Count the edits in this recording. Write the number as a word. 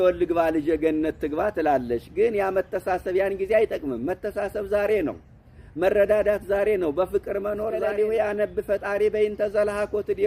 one